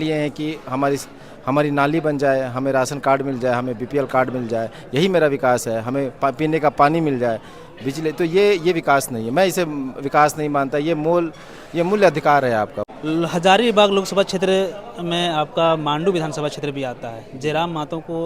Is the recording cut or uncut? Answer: cut